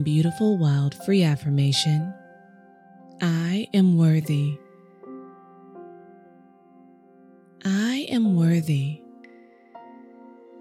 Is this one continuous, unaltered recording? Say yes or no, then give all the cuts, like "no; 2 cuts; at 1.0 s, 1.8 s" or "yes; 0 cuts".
yes; 0 cuts